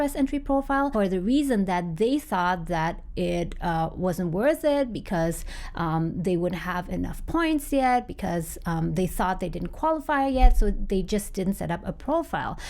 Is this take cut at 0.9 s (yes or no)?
yes